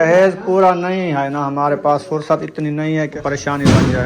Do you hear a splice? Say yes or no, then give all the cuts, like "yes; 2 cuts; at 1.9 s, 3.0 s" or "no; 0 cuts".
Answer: yes; 1 cut; at 3.1 s